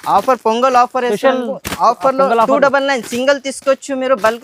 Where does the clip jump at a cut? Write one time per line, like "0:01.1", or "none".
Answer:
none